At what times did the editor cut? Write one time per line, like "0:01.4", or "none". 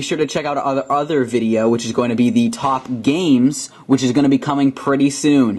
0:04.5